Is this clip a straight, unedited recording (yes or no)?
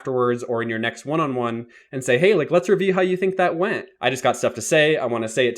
no